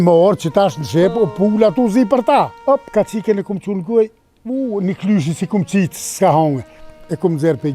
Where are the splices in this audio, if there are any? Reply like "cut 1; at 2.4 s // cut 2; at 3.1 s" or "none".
cut 1; at 2.5 s